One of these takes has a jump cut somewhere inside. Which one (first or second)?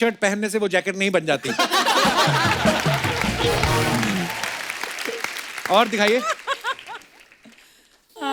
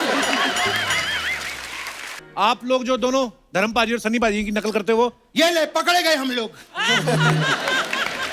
second